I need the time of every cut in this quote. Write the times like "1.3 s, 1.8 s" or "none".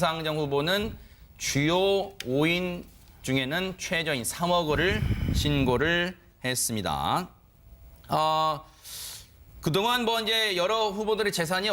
5.9 s